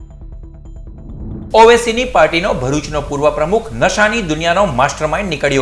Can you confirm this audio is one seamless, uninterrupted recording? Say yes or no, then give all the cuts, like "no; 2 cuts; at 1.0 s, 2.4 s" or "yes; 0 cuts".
no; 1 cut; at 1.2 s